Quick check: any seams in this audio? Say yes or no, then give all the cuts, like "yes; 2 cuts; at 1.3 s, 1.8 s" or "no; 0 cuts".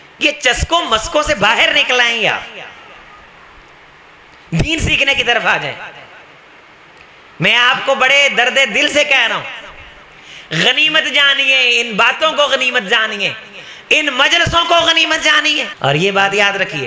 yes; 1 cut; at 15.7 s